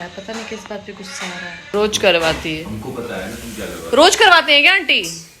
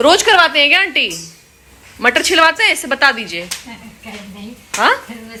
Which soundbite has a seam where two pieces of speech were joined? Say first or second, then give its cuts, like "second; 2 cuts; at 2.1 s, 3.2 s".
first; 1 cut; at 1.5 s